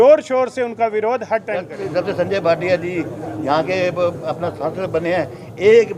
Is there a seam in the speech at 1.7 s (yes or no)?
yes